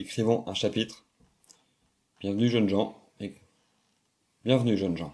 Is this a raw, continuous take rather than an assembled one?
yes; 0 cuts

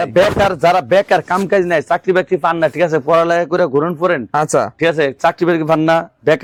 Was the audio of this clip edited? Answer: no; 0 cuts

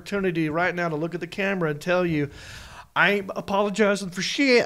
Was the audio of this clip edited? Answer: no; 0 cuts

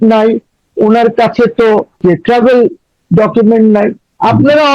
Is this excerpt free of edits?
no; 1 cut; at 2.0 s

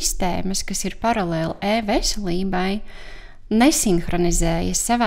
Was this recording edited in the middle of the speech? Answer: no; 0 cuts

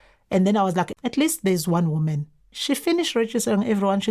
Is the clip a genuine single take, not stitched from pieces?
no; 2 cuts; at 0.9 s, 2.5 s

